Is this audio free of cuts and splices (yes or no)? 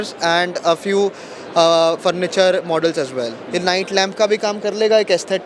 no